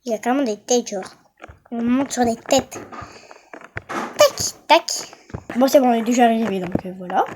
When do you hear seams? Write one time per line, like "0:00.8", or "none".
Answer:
0:05.4